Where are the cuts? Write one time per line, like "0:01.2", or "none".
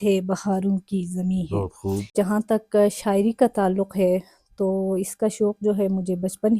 0:02.1